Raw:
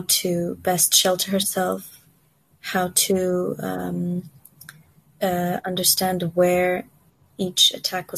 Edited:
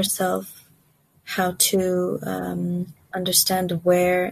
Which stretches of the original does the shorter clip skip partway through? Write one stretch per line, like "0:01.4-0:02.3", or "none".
0:04.5-0:05.6